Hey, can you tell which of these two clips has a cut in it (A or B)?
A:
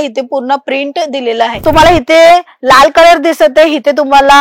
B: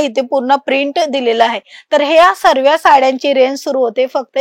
A